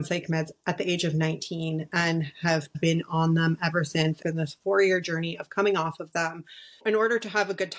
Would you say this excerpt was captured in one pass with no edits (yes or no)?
no